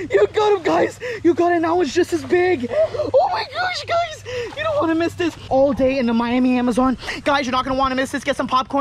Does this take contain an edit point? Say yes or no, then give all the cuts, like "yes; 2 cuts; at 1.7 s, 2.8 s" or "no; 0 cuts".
yes; 1 cut; at 5.4 s